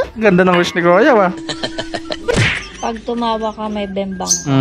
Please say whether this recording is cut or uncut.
cut